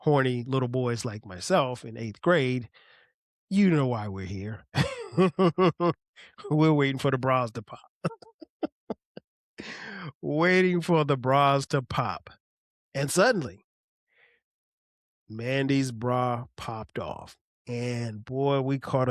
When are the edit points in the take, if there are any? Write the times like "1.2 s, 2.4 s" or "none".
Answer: none